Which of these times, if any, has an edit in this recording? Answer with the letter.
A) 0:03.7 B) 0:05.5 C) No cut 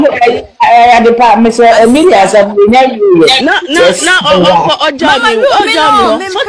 C